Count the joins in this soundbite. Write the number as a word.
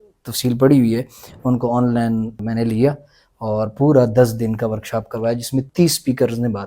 two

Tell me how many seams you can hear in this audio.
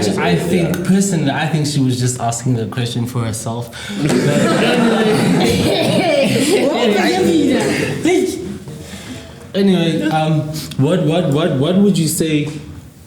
zero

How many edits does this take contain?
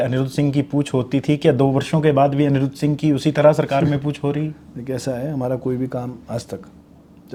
zero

